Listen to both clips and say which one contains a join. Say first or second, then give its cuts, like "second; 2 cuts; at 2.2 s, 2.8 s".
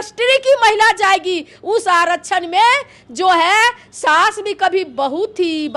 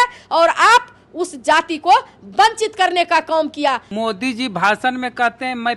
second; 1 cut; at 3.9 s